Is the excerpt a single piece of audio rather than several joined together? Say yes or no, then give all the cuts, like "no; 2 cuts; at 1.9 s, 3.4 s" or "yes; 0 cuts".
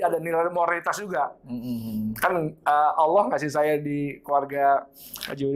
yes; 0 cuts